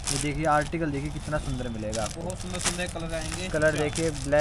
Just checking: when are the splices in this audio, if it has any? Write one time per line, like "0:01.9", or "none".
none